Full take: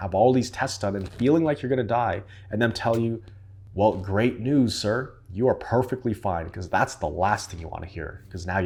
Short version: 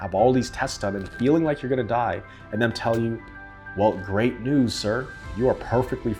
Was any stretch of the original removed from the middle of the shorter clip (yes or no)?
no